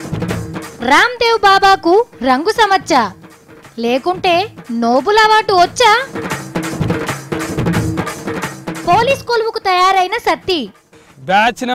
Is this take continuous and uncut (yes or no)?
no